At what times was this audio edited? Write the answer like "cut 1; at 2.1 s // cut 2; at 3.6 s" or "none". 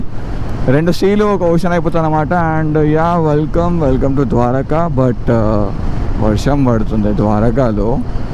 none